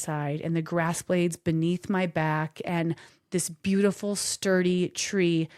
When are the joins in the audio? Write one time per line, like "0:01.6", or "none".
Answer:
none